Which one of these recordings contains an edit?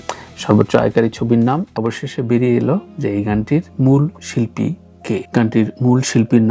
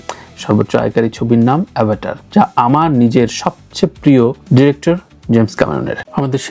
first; 1 cut; at 1.7 s

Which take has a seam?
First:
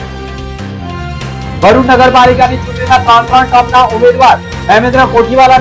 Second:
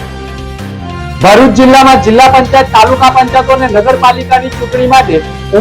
second; 1 cut; at 1.2 s

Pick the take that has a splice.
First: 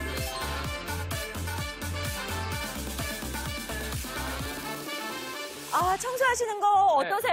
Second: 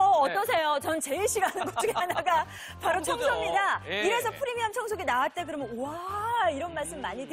second; 2 cuts; at 4.4 s, 6.1 s

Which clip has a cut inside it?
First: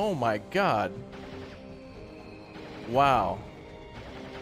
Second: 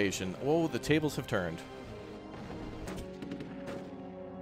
second; 1 cut; at 2.9 s

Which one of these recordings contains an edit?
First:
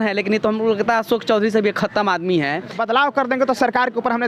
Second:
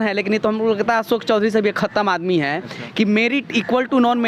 first; 1 cut; at 2.8 s

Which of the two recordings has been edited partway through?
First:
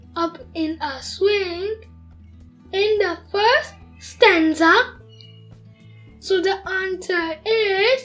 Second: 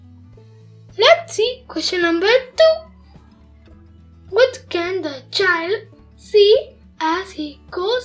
second; 1 cut; at 0.9 s

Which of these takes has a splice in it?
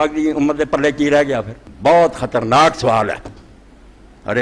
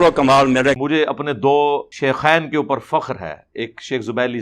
second; 2 cuts; at 0.8 s, 1.9 s

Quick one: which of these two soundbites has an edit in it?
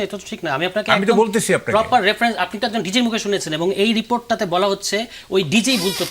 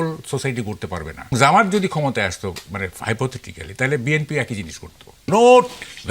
second; 2 cuts; at 1.3 s, 5.1 s

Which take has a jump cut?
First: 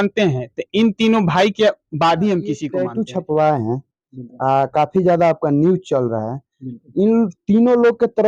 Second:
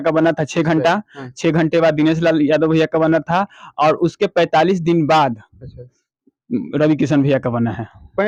first; 1 cut; at 2.7 s

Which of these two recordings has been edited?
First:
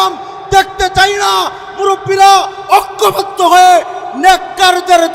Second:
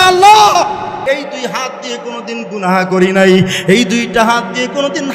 second; 1 cut; at 1.0 s

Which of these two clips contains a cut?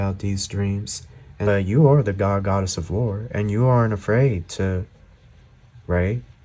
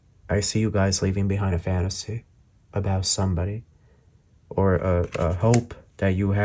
first; 1 cut; at 1.5 s

